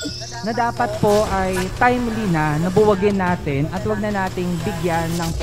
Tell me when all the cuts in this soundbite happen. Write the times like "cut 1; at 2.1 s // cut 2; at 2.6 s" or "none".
none